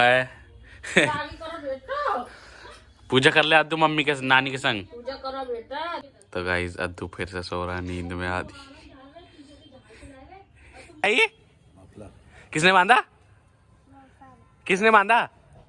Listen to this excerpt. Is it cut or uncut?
cut